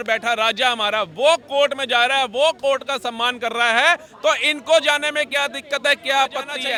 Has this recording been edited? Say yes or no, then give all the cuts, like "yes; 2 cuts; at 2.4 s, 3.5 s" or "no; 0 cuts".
no; 0 cuts